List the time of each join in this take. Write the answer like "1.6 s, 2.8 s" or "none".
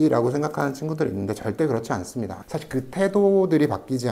2.4 s